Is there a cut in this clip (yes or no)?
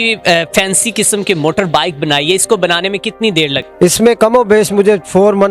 yes